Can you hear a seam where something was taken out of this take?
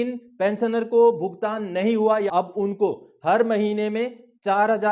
yes; 1 cut; at 2.3 s

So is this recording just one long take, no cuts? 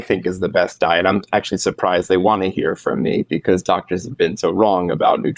yes; 0 cuts

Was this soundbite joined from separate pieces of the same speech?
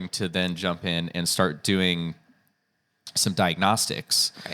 no; 0 cuts

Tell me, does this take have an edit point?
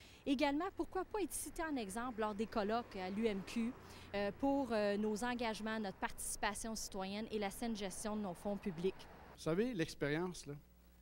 yes; 1 cut; at 9.3 s

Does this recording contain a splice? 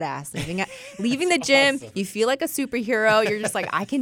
no; 0 cuts

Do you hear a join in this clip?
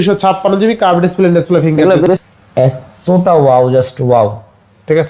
yes; 1 cut; at 2.1 s

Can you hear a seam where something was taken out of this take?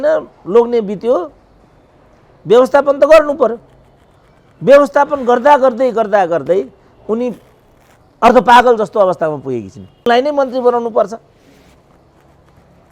no; 0 cuts

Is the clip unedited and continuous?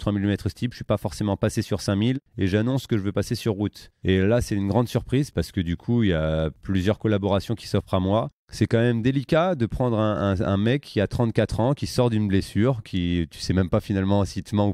no; 5 cuts; at 2.3 s, 3.9 s, 5.3 s, 6.6 s, 8.4 s

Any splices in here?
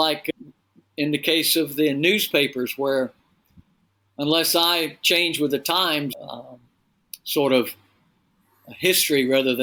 no; 0 cuts

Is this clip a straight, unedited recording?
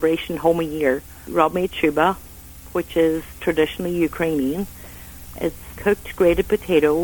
no; 2 cuts; at 1.3 s, 5.6 s

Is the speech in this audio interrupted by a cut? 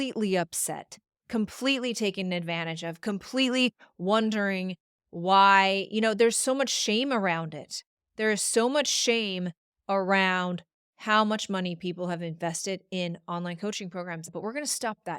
yes; 1 cut; at 14.3 s

